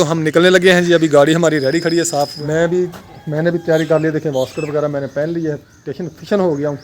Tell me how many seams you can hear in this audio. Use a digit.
1